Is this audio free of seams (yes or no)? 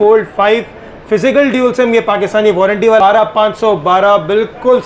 no